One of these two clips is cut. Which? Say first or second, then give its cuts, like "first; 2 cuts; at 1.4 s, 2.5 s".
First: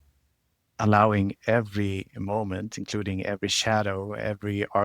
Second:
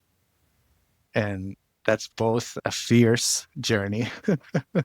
second; 2 cuts; at 1.0 s, 2.2 s